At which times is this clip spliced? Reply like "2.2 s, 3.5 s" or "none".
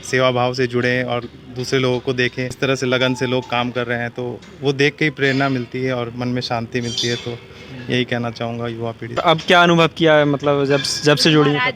2.5 s, 9.2 s

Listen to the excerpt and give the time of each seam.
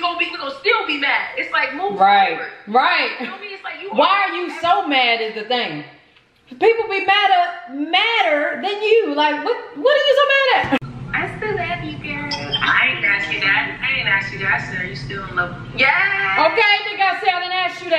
10.8 s

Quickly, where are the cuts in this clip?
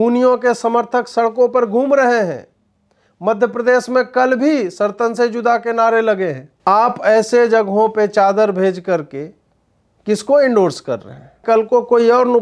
6.5 s, 11.4 s

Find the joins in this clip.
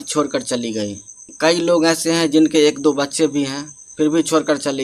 none

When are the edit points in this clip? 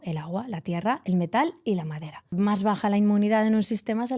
2.3 s

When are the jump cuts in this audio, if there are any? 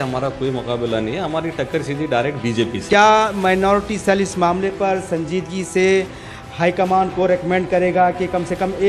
2.8 s

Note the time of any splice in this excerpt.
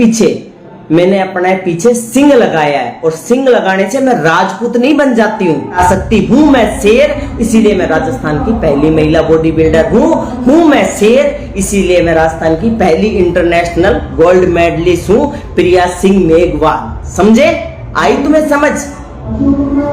5.7 s

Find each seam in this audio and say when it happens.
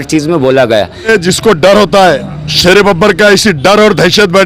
1.1 s

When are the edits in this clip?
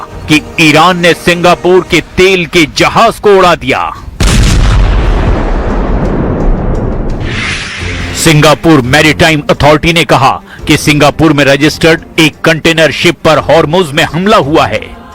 11.4 s

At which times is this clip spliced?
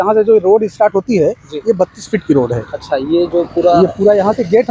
none

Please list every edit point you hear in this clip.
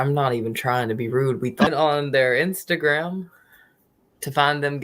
1.7 s

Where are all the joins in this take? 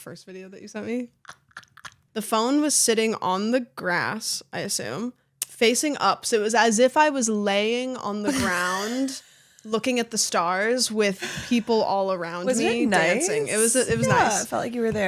2.0 s

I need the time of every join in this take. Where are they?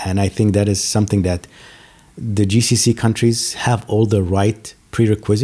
3.5 s

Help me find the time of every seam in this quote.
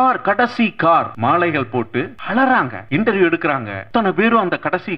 1.1 s, 2.2 s, 2.8 s, 3.7 s

